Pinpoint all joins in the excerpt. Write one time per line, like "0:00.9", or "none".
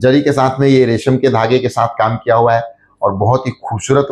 none